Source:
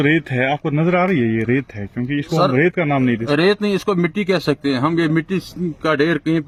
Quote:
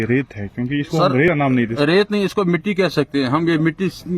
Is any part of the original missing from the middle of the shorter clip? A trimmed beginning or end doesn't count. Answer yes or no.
yes